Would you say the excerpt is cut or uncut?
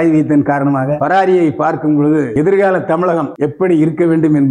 cut